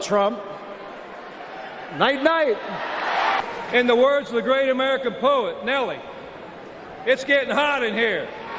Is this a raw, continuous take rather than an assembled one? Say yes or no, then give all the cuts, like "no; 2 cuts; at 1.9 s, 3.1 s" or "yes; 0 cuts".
no; 1 cut; at 3.4 s